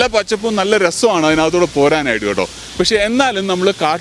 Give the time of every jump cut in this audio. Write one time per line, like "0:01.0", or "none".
0:02.6